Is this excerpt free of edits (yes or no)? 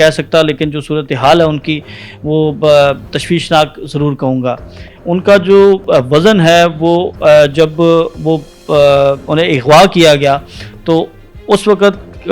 yes